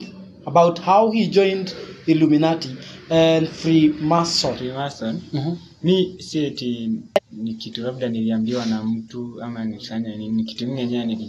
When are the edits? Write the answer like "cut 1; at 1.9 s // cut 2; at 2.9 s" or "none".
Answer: cut 1; at 4.6 s